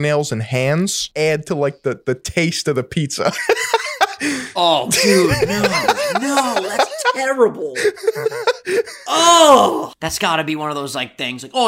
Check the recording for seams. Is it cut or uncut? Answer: cut